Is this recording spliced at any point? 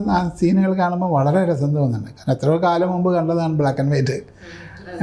no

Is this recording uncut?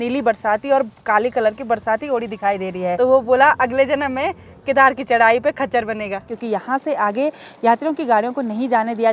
no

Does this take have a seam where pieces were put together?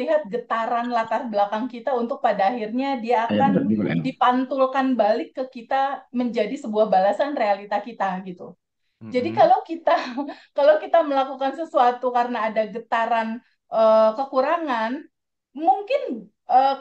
no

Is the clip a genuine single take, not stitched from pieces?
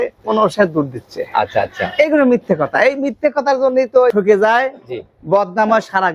no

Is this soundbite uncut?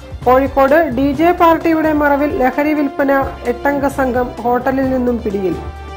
yes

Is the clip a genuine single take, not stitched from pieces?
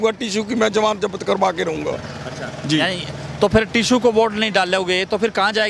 yes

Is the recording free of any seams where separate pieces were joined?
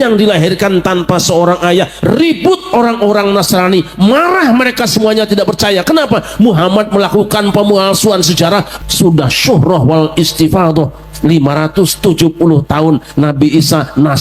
no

